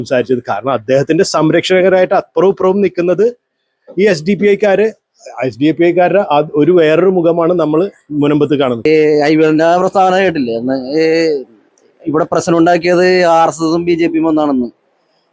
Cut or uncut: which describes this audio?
cut